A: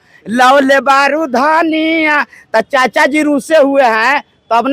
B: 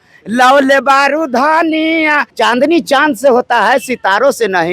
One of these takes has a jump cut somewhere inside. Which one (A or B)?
B